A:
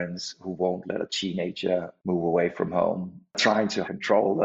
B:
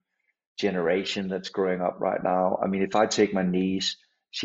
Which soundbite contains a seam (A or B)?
A